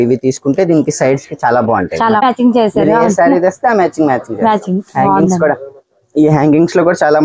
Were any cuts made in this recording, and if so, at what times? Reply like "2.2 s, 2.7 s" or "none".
2.2 s